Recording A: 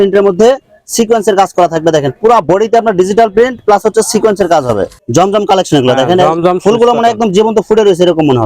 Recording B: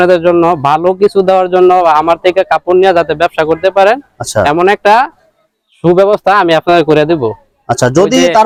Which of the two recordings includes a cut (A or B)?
A